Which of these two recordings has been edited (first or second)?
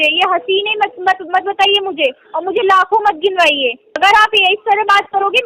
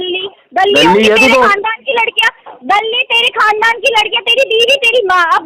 first